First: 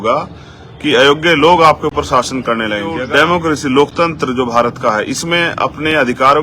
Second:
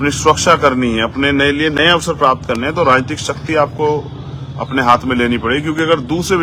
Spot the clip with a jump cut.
first; 1 cut; at 3.0 s

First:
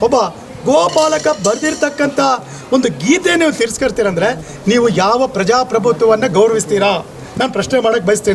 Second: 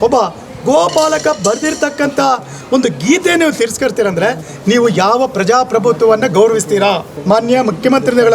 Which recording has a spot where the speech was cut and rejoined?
second; 1 cut; at 7.1 s

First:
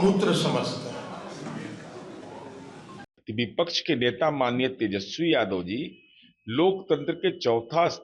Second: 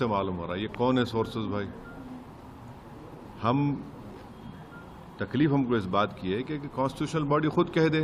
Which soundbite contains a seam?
first; 1 cut; at 3.1 s

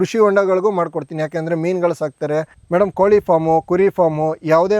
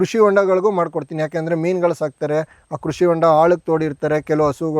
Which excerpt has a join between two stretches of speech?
first; 1 cut; at 2.6 s

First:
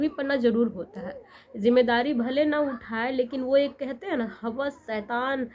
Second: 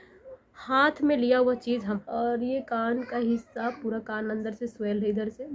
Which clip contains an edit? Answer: second; 1 cut; at 2.0 s

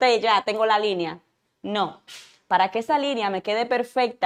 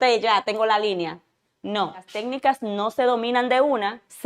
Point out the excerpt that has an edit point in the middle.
second; 1 cut; at 2.1 s

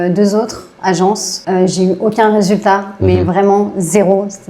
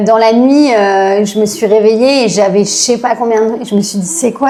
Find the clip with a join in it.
first; 1 cut; at 1.3 s

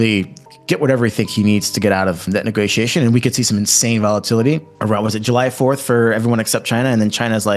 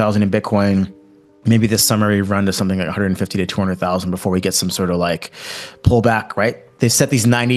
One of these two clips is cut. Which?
first; 1 cut; at 2.3 s

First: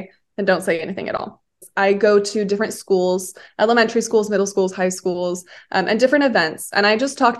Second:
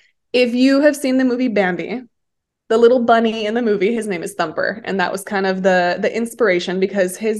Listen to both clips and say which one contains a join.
first; 1 cut; at 1.7 s

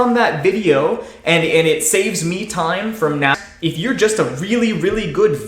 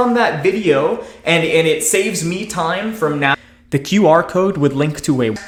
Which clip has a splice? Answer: first; 1 cut; at 3.5 s

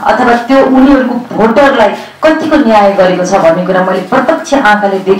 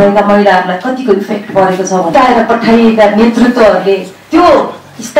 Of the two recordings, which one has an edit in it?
second; 2 cuts; at 2.1 s, 4.1 s

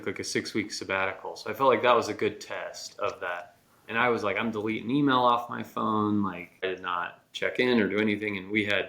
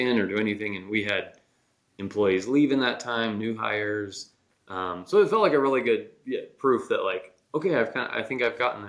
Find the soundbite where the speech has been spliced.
first; 1 cut; at 6.6 s

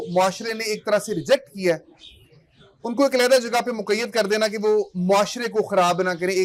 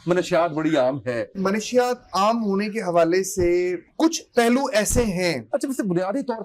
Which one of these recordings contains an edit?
second; 3 cuts; at 1.4 s, 3.8 s, 5.5 s

